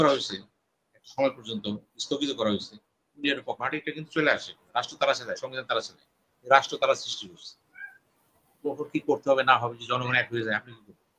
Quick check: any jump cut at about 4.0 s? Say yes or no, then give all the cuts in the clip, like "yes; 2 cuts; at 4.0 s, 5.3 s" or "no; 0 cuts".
yes; 1 cut; at 4.0 s